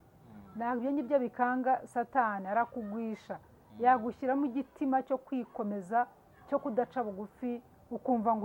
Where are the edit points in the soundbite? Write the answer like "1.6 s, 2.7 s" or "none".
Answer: none